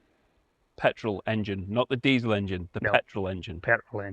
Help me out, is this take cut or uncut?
uncut